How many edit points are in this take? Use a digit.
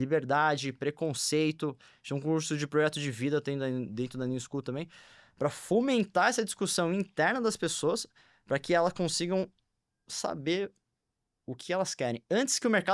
0